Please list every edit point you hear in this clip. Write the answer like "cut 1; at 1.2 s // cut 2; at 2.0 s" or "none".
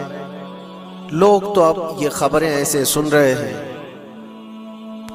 none